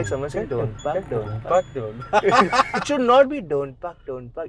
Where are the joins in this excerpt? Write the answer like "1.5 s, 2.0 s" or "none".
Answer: 2.8 s